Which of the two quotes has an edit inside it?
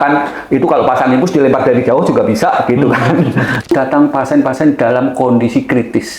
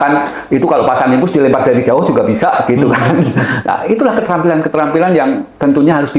first; 1 cut; at 3.7 s

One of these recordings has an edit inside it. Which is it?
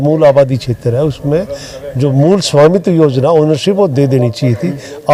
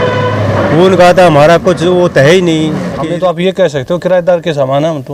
second; 1 cut; at 2.9 s

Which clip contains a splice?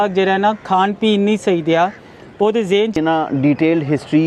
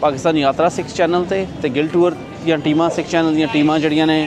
first; 1 cut; at 2.9 s

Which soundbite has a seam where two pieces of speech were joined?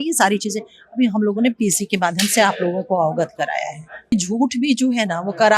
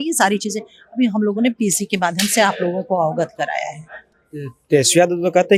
first; 1 cut; at 4.1 s

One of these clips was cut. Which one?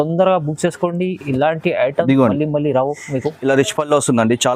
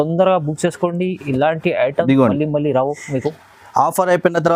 first; 1 cut; at 3.3 s

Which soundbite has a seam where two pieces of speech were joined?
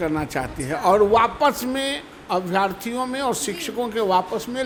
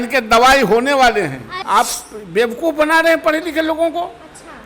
second; 1 cut; at 1.5 s

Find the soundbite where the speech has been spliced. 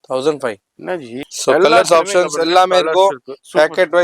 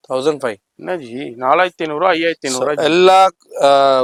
first; 1 cut; at 1.2 s

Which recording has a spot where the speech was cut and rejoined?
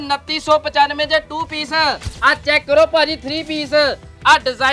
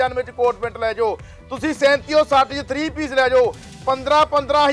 first; 1 cut; at 2.1 s

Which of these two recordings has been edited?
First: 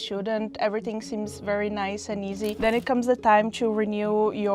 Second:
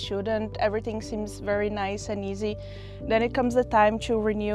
first; 1 cut; at 2.6 s

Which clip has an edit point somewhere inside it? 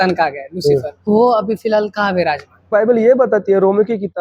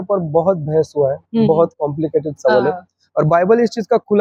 first; 2 cuts; at 1.1 s, 2.7 s

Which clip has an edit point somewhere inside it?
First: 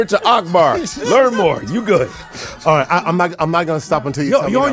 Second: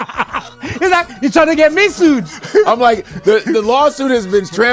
first; 1 cut; at 2.2 s

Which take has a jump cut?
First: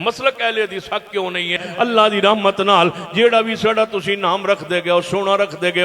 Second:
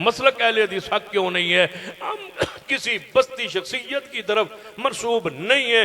first; 1 cut; at 1.6 s

